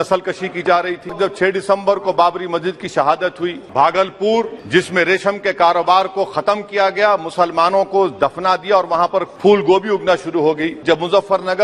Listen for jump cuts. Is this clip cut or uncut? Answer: cut